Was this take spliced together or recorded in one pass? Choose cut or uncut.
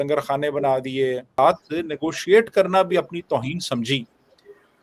cut